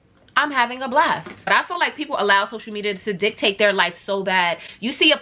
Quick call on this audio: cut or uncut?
uncut